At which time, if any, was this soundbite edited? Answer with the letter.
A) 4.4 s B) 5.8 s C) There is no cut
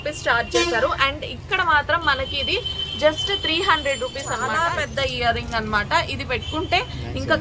A